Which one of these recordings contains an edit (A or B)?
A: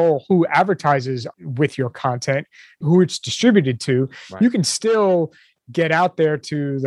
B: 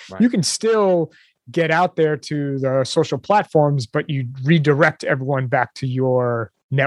A